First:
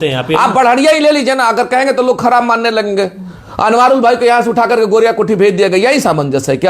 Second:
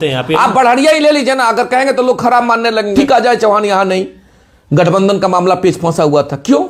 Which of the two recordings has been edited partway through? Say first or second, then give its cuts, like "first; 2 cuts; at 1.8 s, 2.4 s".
first; 1 cut; at 3.0 s